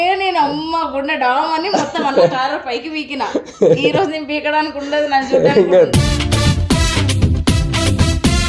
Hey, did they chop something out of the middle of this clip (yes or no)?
no